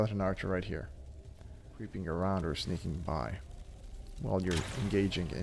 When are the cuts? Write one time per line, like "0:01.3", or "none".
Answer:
0:01.9